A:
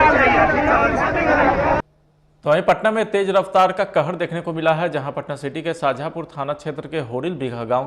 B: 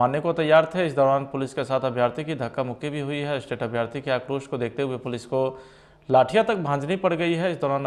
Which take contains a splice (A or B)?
A